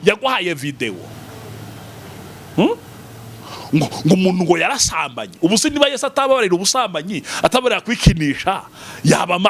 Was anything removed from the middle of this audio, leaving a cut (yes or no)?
no